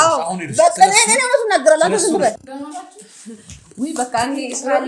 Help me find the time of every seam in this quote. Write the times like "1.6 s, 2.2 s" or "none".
2.3 s